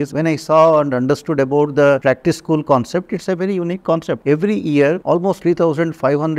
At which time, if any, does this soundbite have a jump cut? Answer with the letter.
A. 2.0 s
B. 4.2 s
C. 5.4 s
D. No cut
D